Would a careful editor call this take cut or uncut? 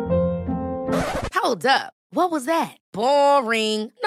uncut